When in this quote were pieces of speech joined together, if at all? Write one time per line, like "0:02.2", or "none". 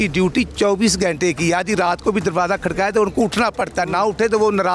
none

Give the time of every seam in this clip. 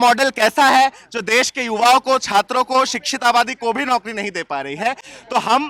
none

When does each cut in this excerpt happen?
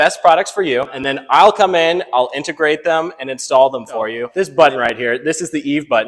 0:01.0
0:04.2

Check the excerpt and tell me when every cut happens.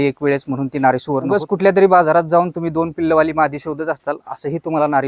0:01.3

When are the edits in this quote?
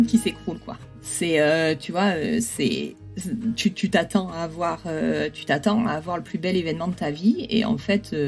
none

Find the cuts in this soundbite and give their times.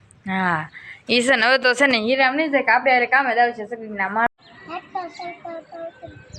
0:04.3

